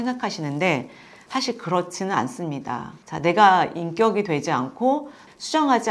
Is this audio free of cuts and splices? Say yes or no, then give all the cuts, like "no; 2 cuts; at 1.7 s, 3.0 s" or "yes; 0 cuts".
yes; 0 cuts